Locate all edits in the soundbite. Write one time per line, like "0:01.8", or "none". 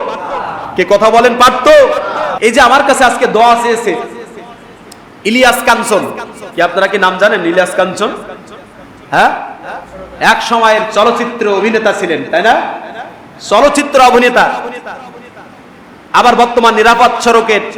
0:02.2